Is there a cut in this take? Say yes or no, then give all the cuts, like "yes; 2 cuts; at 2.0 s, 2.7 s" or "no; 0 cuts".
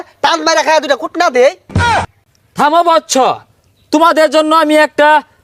no; 0 cuts